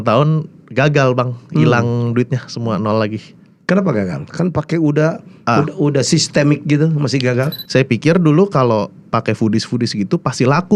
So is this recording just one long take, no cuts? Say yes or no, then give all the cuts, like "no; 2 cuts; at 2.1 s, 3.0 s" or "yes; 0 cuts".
no; 1 cut; at 7.6 s